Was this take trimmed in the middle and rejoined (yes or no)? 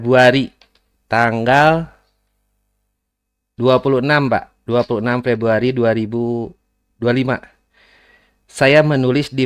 no